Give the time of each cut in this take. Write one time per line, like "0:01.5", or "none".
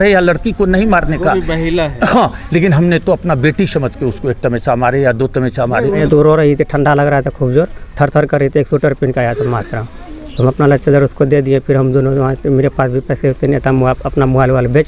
0:06.0